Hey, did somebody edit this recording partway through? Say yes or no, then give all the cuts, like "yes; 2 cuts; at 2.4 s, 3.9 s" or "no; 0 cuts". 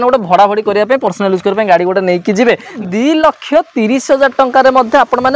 yes; 1 cut; at 2.8 s